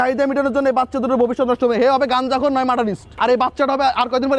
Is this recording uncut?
no; 1 cut; at 3.1 s

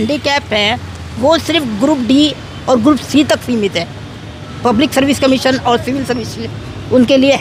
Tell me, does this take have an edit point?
no; 0 cuts

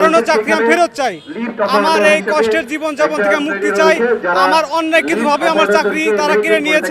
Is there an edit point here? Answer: no; 0 cuts

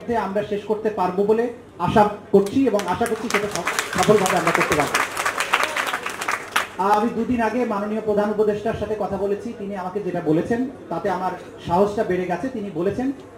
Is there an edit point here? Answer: no; 0 cuts

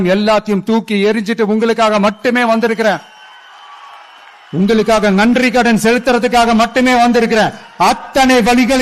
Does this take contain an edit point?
no; 0 cuts

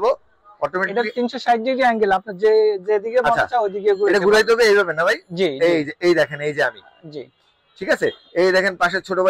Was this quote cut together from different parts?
no; 0 cuts

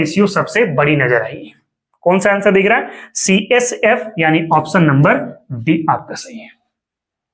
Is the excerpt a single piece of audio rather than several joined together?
yes; 0 cuts

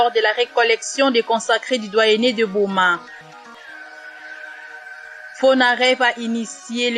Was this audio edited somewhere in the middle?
yes; 2 cuts; at 3.7 s, 5.4 s

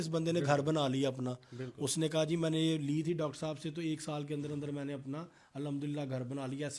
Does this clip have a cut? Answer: no; 0 cuts

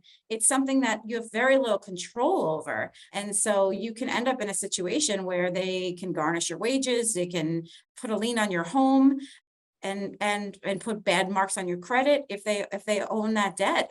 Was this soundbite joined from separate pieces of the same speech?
no; 0 cuts

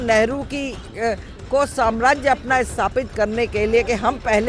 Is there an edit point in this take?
no; 0 cuts

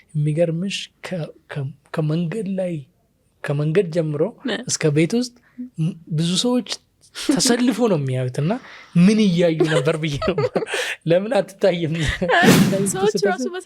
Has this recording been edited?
yes; 1 cut; at 12.7 s

